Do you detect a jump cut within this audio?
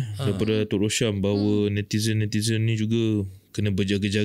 no; 0 cuts

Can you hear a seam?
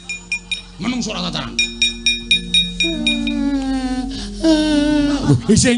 no; 0 cuts

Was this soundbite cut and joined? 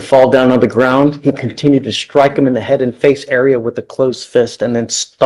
no; 0 cuts

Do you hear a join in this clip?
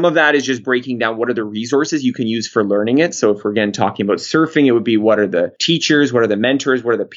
no; 0 cuts

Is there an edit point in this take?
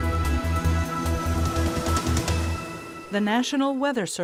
no; 0 cuts

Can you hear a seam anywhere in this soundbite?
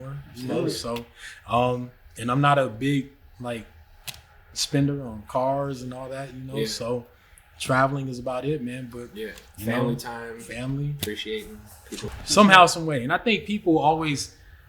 yes; 1 cut; at 12.1 s

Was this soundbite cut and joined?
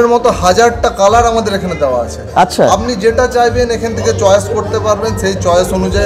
no; 0 cuts

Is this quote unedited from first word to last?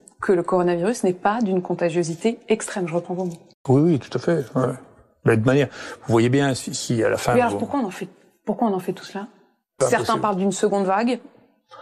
no; 1 cut; at 9.8 s

